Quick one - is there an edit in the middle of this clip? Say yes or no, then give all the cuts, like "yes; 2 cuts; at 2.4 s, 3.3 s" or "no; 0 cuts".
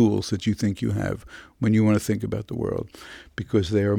no; 0 cuts